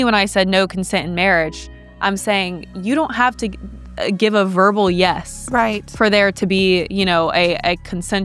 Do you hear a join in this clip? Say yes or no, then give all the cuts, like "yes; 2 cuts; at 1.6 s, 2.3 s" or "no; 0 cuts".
no; 0 cuts